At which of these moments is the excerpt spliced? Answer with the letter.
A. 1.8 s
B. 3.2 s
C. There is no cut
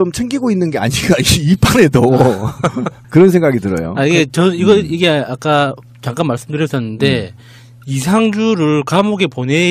A